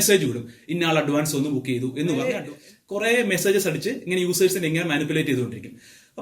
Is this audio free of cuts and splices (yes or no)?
no